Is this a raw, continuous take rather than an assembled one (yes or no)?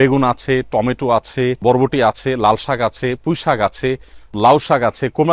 no